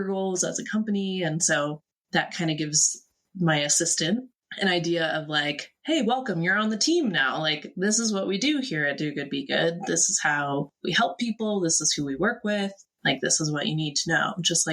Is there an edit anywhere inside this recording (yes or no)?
yes